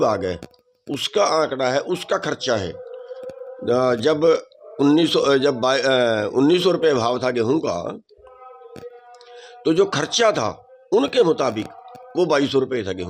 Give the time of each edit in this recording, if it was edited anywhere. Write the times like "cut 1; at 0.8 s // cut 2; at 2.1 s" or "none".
none